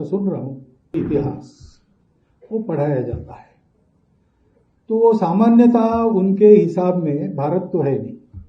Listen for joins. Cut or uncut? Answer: cut